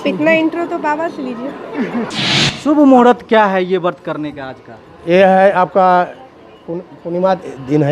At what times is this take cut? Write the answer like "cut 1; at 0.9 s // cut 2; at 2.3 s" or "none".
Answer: cut 1; at 2.1 s